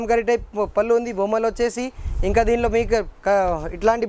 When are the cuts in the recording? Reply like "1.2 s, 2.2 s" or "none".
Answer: none